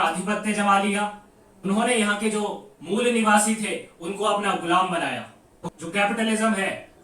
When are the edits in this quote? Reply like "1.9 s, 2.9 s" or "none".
5.5 s